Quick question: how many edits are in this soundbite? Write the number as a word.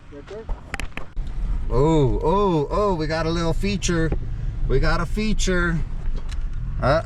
one